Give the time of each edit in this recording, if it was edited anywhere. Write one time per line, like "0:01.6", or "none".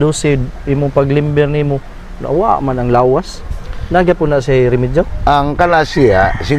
none